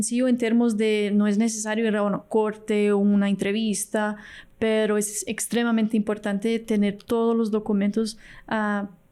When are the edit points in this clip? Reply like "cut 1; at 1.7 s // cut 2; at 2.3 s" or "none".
none